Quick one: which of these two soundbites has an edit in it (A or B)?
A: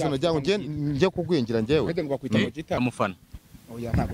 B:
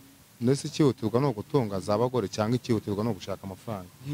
A